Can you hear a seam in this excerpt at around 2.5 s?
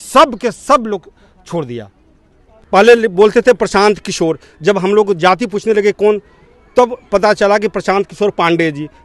yes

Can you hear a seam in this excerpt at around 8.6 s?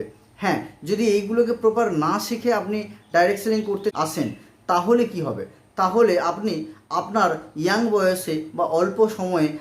no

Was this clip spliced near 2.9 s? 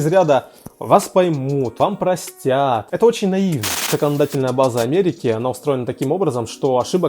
yes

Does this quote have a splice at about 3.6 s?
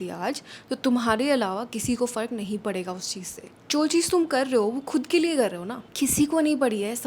yes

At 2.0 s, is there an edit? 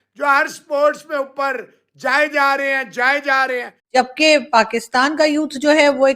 no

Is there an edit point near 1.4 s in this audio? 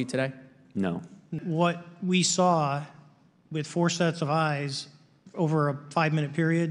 yes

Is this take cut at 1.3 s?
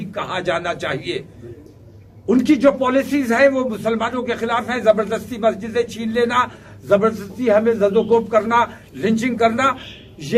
no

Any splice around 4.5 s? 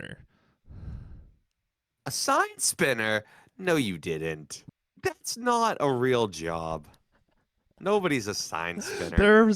yes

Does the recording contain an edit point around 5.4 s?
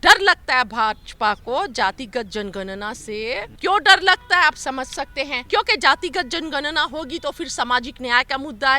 yes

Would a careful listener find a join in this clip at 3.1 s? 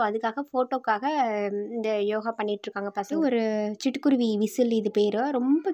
yes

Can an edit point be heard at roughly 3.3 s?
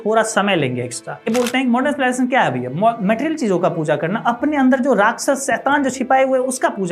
no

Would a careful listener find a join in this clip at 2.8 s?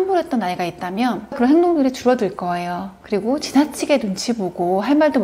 no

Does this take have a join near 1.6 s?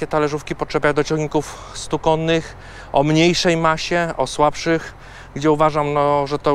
no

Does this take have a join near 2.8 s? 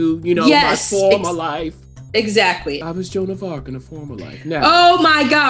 yes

